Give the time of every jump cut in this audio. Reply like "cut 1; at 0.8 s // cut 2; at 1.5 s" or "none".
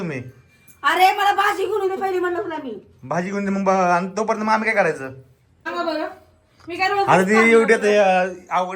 cut 1; at 5.7 s